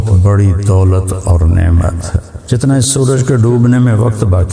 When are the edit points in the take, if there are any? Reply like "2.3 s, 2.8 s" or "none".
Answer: 2.3 s